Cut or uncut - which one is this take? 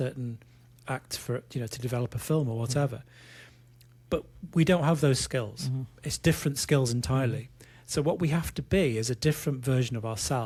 uncut